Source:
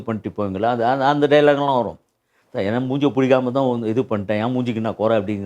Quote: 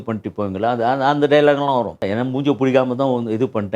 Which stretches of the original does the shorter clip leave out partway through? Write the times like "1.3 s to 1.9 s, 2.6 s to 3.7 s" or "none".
2.0 s to 2.5 s